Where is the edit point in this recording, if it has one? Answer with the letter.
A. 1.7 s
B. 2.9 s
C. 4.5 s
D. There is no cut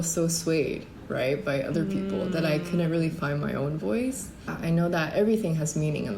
C